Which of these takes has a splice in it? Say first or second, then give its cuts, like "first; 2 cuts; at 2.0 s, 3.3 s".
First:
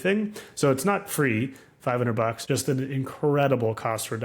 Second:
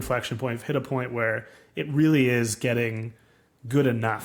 first; 1 cut; at 2.4 s